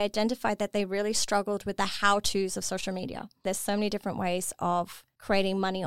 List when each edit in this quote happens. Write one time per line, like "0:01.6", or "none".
0:03.5